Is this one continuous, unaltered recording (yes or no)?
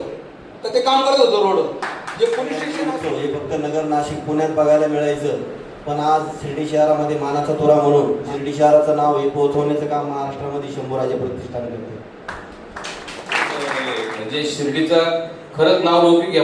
no